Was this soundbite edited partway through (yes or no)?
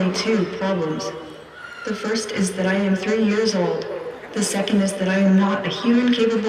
no